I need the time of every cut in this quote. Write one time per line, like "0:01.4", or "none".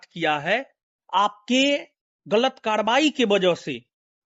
none